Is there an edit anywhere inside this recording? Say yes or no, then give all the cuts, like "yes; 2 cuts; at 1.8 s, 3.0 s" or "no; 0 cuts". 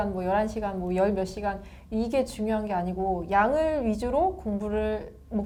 no; 0 cuts